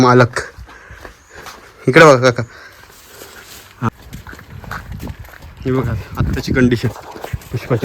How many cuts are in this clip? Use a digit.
1